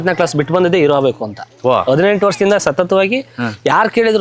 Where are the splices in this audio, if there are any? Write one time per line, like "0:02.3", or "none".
none